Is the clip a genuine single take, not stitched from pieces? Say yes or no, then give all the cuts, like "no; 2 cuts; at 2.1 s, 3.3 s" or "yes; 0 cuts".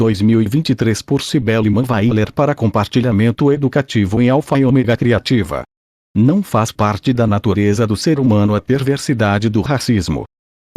no; 1 cut; at 6.4 s